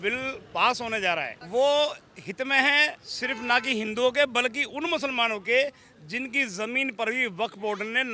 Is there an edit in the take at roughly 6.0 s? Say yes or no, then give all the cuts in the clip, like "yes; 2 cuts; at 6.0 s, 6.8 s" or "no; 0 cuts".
no; 2 cuts; at 1.4 s, 3.1 s